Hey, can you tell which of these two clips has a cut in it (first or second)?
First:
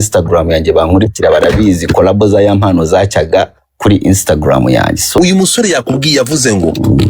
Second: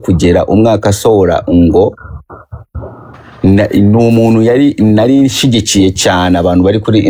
first